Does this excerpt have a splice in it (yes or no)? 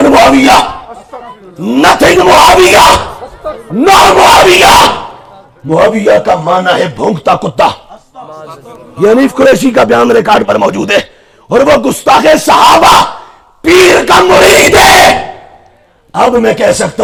no